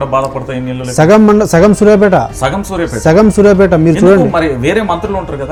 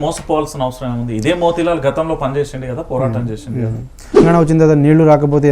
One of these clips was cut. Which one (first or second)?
second